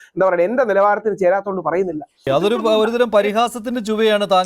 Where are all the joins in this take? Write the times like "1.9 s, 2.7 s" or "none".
2.3 s